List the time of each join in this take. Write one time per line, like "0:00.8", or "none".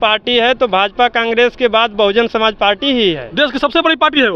none